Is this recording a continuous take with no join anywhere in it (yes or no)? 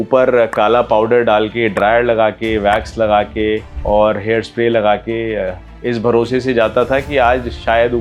yes